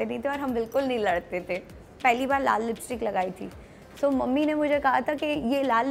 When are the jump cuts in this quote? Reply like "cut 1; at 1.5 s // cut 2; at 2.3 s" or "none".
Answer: cut 1; at 2.0 s